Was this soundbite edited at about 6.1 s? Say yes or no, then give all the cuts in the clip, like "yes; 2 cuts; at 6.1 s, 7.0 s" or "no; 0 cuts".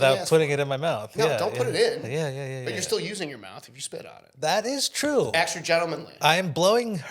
yes; 1 cut; at 6.1 s